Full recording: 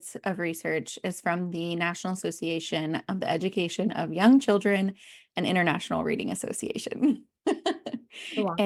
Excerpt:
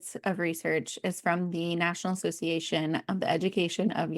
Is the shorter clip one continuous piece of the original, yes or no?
yes